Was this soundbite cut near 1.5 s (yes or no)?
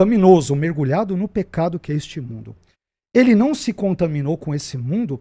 no